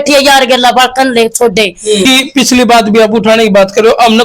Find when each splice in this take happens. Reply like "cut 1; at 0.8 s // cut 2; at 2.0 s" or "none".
cut 1; at 2.0 s